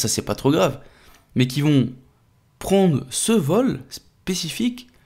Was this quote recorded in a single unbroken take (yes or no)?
yes